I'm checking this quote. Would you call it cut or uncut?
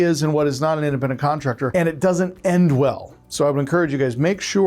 cut